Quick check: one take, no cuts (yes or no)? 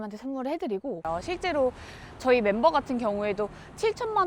no